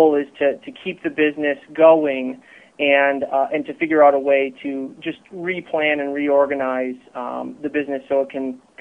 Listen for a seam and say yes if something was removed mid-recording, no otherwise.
no